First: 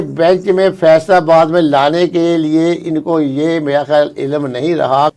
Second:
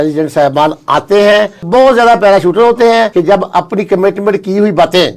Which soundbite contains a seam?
second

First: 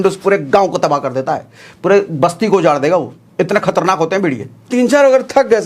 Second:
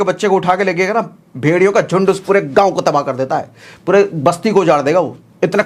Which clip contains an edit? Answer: first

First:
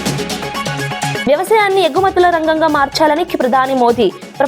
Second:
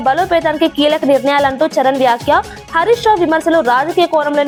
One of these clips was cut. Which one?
first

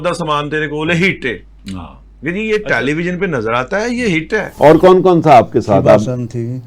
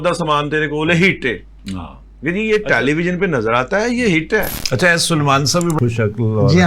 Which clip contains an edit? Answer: first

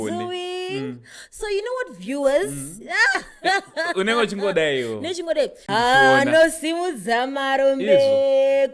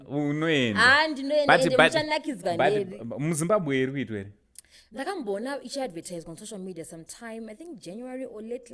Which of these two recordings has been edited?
first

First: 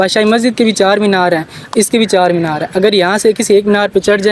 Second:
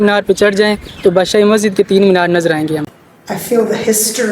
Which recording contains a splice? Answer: second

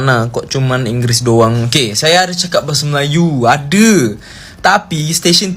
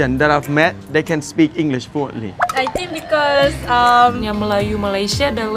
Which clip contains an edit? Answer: second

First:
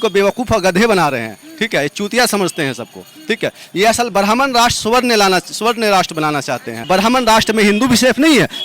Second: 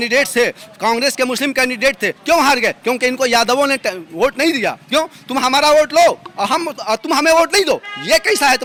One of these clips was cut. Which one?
first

